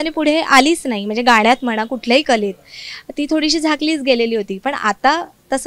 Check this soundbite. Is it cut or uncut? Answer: uncut